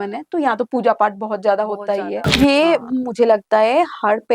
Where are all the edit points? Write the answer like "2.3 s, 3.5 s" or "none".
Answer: 2.3 s